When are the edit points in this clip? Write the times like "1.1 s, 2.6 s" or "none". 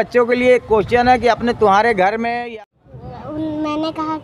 2.4 s